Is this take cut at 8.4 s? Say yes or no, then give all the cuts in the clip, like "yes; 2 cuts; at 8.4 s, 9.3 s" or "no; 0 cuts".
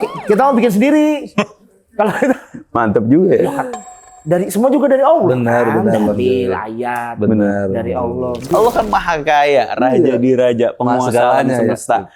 yes; 1 cut; at 8.4 s